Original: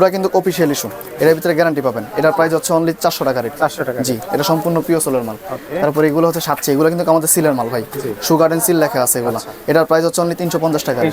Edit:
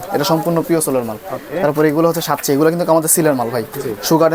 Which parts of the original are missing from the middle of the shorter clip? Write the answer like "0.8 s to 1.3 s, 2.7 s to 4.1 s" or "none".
none